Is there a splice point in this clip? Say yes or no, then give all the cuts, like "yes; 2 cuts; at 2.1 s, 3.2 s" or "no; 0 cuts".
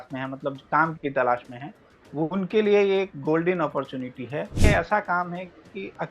yes; 1 cut; at 4.7 s